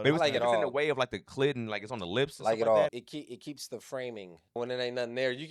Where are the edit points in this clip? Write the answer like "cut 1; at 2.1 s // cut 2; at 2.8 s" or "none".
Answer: cut 1; at 3.0 s // cut 2; at 4.6 s